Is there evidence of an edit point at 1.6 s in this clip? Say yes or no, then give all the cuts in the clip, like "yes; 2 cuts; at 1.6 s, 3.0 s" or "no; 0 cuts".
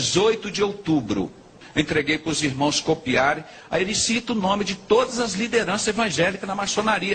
yes; 1 cut; at 1.6 s